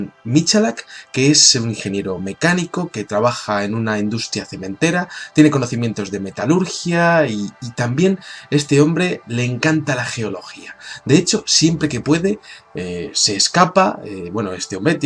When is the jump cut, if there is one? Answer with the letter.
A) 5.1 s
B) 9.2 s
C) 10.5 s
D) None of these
D